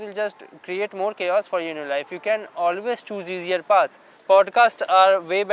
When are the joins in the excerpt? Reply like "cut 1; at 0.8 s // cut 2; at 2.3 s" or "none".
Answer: cut 1; at 4.1 s